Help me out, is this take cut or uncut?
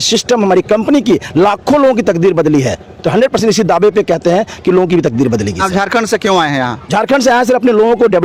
uncut